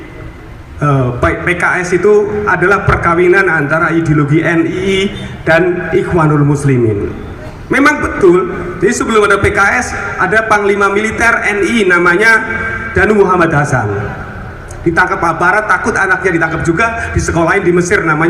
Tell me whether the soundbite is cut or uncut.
uncut